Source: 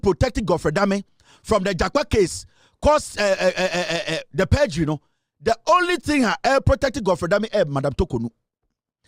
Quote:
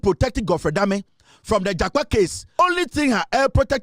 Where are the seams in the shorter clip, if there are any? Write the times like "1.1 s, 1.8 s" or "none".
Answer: 2.6 s